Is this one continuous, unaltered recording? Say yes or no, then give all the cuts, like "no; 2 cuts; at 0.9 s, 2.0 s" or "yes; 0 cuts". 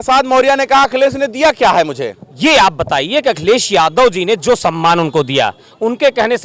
yes; 0 cuts